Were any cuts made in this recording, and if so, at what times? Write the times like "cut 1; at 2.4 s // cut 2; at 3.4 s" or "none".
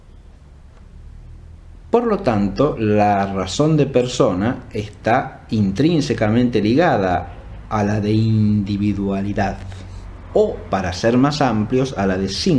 cut 1; at 7.1 s